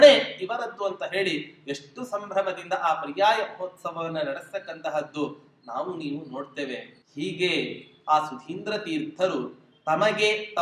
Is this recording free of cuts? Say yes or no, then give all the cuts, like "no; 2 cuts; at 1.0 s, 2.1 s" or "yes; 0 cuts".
no; 1 cut; at 7.0 s